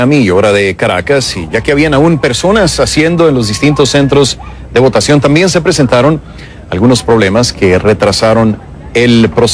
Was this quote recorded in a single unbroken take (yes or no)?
no